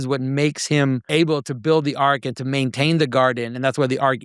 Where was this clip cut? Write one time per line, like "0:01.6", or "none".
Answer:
0:01.1

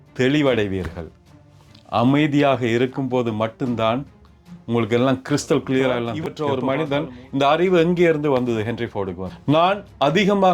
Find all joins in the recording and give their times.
0:06.1

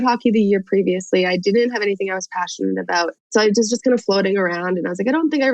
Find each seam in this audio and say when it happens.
none

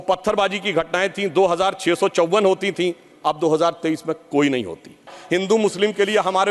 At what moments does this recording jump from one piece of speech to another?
0:05.1

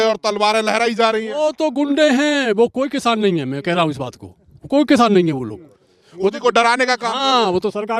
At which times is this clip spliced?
none

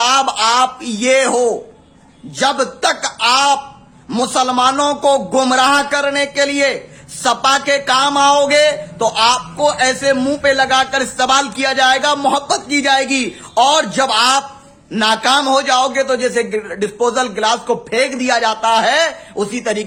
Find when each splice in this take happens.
none

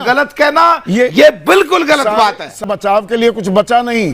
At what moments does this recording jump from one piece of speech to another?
0:02.6

